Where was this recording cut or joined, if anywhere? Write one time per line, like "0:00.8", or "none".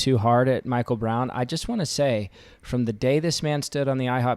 none